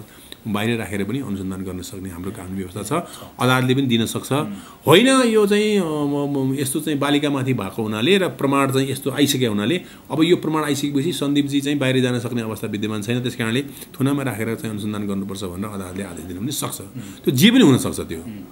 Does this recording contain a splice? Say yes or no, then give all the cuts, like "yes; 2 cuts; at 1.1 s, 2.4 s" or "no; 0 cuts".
no; 0 cuts